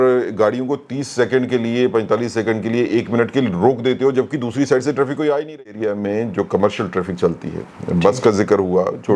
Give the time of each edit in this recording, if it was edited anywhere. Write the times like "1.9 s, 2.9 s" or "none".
5.8 s